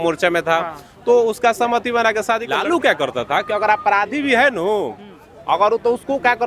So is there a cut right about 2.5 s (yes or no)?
yes